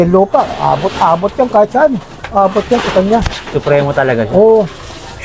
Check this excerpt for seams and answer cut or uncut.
uncut